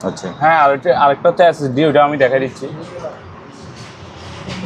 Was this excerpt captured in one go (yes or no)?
yes